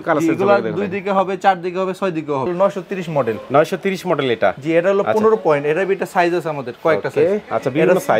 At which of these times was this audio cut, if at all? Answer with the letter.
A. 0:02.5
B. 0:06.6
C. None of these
A